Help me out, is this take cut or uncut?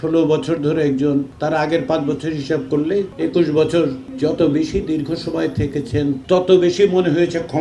cut